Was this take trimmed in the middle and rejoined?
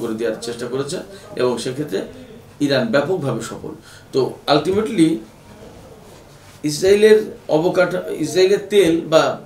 no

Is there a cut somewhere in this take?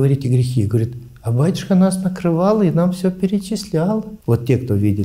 yes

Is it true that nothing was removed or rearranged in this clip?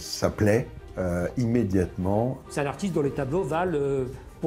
no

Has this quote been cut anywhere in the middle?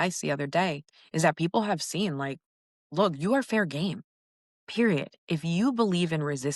yes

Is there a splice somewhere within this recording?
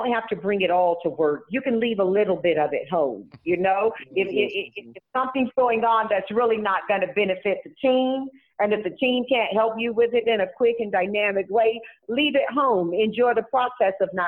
no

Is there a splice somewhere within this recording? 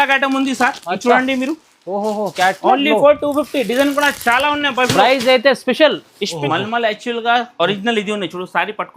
yes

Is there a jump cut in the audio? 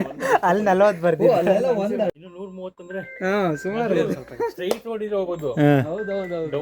yes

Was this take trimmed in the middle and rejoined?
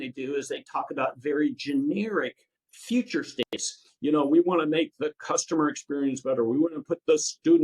no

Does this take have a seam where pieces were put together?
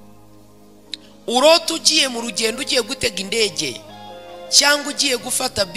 yes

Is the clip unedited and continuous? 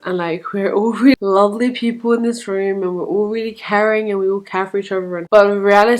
no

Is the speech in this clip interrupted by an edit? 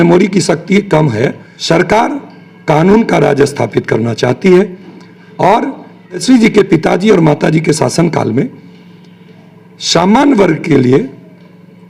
yes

